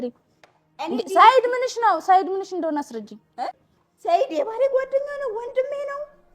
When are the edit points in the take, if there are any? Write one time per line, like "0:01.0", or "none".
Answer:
0:03.6

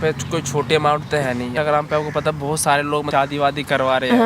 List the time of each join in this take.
0:01.5
0:03.1

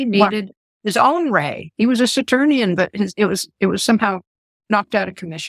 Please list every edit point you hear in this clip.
none

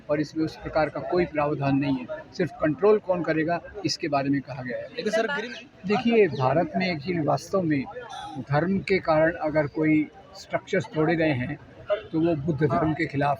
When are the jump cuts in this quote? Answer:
0:05.4

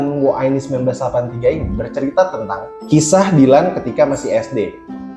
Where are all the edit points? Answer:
0:02.7

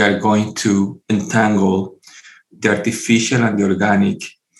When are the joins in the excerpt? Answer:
0:01.0

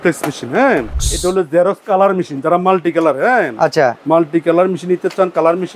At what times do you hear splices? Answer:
0:01.0

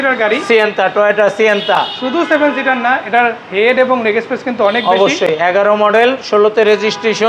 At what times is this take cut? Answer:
none

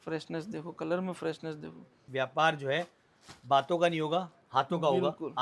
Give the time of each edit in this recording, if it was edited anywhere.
0:02.0

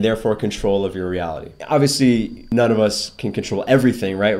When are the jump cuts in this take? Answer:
0:01.5
0:02.4

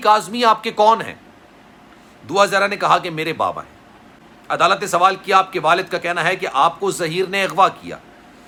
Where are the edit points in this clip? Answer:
none

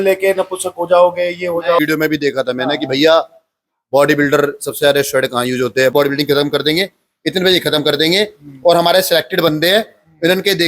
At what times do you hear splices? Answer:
0:01.8
0:05.9

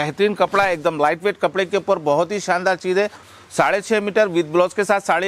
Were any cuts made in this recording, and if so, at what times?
none

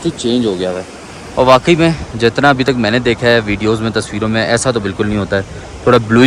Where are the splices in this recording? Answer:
none

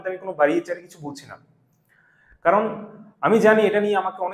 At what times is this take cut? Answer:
none

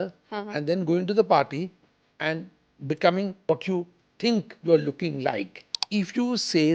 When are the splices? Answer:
0:03.4
0:05.8

